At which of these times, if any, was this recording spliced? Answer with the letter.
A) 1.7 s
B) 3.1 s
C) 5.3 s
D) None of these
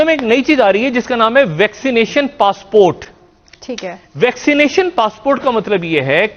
D